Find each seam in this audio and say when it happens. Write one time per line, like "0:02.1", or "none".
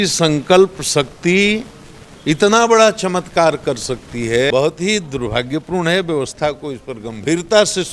0:04.5